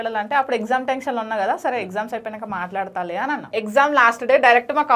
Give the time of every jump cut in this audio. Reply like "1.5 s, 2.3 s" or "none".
3.5 s